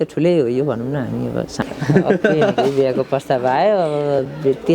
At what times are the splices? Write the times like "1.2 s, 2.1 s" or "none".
1.6 s